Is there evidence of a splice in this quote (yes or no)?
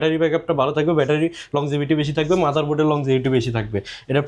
no